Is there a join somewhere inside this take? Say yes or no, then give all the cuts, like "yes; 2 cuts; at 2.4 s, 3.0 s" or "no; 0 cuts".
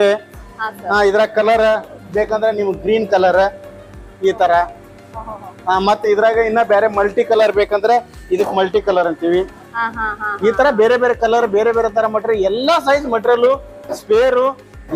no; 0 cuts